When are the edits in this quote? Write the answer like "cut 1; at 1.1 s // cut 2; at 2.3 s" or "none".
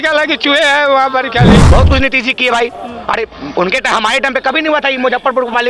cut 1; at 1.6 s